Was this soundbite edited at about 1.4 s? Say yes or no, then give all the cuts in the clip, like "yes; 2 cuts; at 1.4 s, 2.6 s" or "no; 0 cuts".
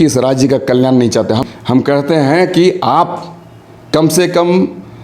yes; 1 cut; at 1.4 s